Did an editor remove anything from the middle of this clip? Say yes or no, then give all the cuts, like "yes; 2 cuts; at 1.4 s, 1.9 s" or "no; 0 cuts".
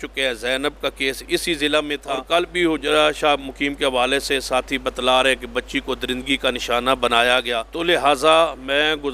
yes; 2 cuts; at 2.1 s, 7.6 s